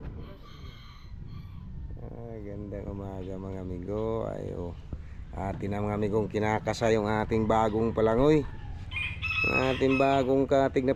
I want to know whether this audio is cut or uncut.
uncut